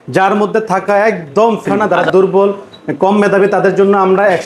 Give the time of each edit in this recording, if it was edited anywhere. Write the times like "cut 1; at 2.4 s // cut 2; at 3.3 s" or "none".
cut 1; at 1.9 s